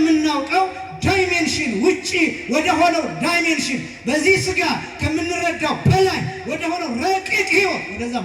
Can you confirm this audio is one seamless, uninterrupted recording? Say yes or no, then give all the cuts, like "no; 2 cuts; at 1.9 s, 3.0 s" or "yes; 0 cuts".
yes; 0 cuts